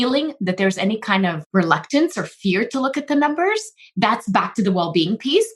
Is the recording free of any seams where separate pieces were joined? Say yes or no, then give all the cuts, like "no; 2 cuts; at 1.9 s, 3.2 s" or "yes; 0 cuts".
no; 1 cut; at 1.4 s